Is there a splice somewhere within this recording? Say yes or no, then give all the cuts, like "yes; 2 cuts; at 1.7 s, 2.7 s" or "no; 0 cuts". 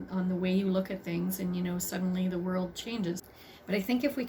yes; 1 cut; at 3.2 s